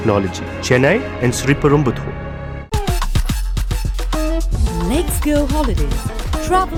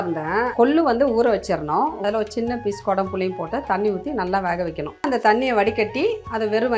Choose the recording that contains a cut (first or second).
second